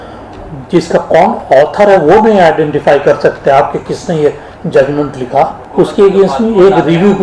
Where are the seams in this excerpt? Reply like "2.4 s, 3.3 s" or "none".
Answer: 5.6 s